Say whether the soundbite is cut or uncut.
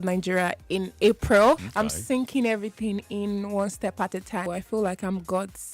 cut